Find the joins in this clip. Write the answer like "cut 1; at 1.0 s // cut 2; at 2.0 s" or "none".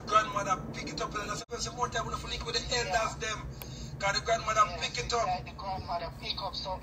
cut 1; at 1.4 s